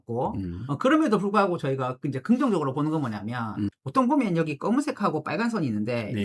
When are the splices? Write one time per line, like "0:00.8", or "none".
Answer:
0:03.7